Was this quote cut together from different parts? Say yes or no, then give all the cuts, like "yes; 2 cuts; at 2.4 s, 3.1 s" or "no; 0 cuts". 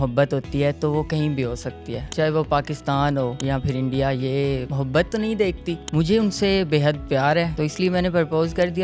yes; 5 cuts; at 2.0 s, 3.4 s, 4.7 s, 5.7 s, 7.5 s